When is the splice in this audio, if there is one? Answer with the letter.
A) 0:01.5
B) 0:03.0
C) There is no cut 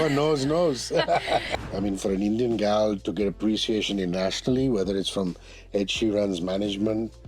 A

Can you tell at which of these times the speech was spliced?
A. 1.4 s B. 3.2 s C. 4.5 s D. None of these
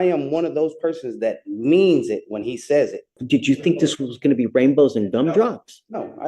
B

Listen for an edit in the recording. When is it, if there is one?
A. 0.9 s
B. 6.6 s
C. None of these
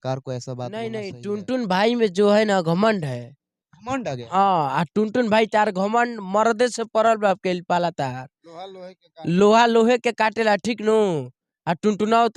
A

